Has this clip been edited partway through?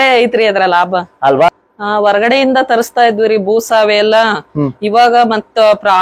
yes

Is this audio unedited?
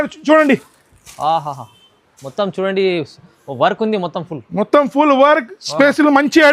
yes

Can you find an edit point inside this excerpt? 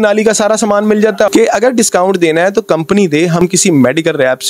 yes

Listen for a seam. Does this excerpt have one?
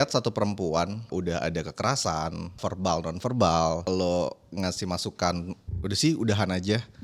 yes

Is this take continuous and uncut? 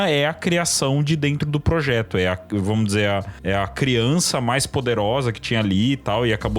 no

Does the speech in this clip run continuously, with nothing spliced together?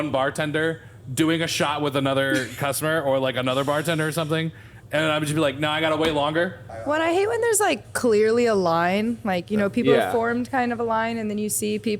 no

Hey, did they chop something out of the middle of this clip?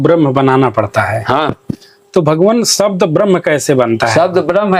no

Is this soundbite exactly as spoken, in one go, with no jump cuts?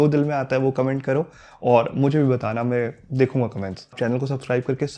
no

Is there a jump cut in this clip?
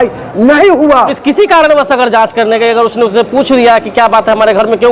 yes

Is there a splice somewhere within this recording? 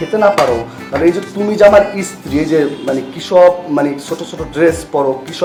no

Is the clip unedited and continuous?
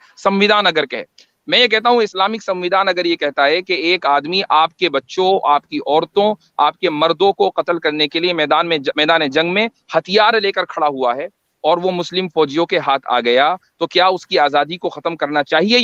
yes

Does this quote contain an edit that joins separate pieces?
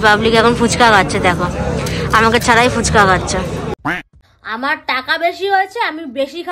yes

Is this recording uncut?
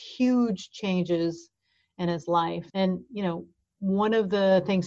no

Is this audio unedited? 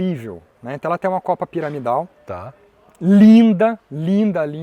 yes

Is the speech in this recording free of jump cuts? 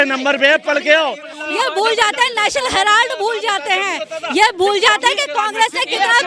no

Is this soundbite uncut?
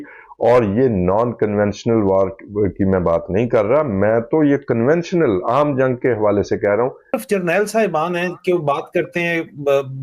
no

